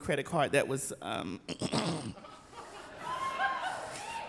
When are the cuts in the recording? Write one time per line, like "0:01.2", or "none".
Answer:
none